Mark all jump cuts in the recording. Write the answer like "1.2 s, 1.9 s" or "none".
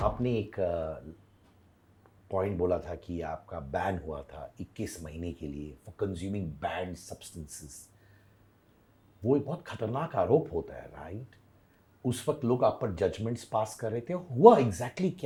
none